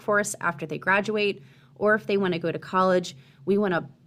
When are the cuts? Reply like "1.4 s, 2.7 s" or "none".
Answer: none